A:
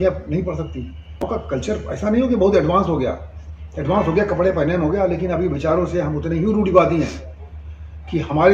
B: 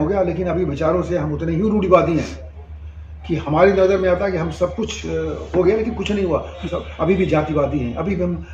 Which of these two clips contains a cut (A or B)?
A